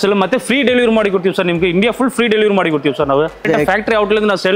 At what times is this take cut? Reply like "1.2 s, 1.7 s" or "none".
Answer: 3.4 s